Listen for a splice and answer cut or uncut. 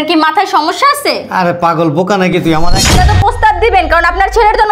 cut